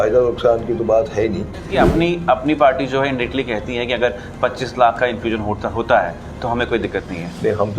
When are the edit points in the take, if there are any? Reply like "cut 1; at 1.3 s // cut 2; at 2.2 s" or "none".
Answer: cut 1; at 1.7 s